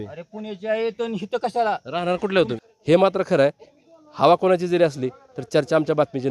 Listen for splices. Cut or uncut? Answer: cut